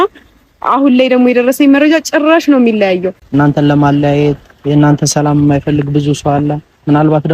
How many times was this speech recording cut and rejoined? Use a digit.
1